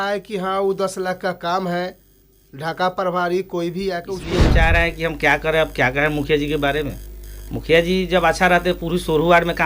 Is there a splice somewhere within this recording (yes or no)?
yes